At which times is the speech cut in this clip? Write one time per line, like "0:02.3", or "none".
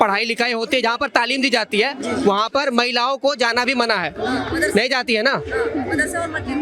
none